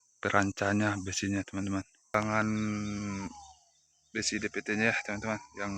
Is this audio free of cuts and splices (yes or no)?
no